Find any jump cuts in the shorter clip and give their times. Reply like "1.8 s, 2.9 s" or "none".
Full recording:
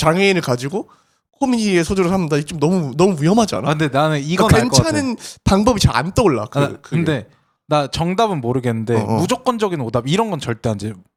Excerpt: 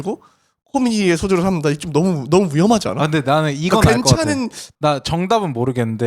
4.6 s